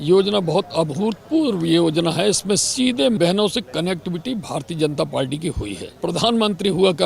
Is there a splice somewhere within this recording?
yes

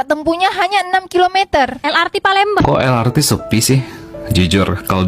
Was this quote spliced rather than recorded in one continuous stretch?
yes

